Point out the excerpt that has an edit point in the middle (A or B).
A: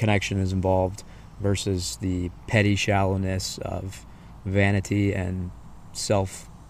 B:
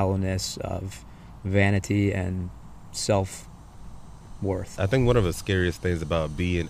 B